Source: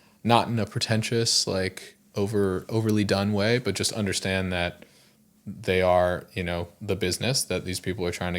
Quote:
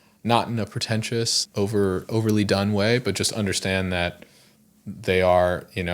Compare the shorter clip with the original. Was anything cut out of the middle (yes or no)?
yes